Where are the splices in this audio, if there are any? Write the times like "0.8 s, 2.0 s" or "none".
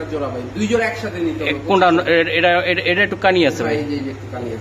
none